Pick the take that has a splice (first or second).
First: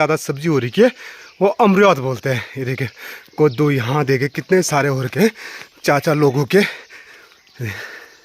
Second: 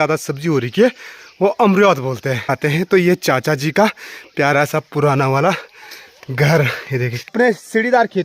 second